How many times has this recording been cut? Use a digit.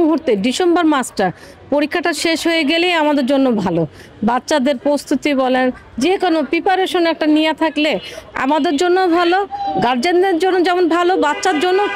0